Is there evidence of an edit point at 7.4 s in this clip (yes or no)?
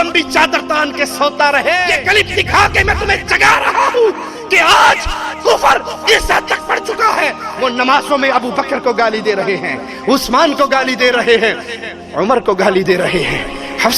no